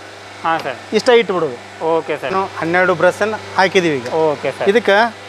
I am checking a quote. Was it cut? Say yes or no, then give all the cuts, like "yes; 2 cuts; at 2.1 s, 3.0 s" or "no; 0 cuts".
yes; 1 cut; at 2.3 s